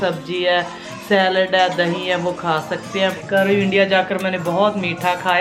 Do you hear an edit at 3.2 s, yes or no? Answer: yes